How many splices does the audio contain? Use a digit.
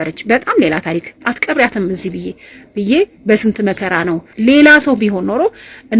2